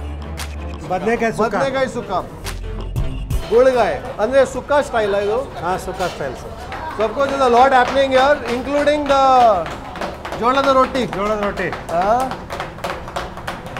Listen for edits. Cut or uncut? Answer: uncut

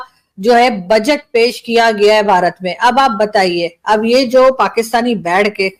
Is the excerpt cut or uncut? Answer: uncut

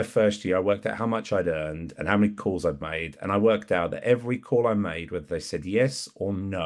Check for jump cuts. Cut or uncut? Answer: uncut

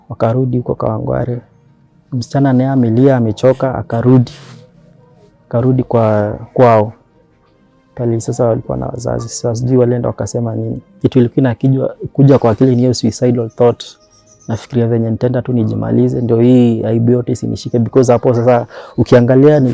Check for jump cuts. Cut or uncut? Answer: cut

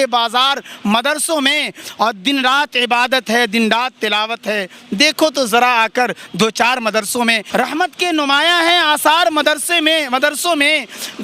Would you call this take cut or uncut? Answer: cut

